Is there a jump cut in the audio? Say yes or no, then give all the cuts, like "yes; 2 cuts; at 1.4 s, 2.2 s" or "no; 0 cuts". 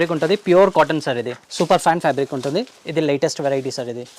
yes; 1 cut; at 2.7 s